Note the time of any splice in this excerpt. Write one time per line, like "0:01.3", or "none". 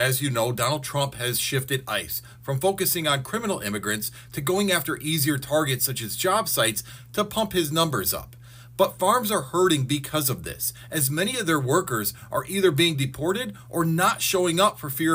none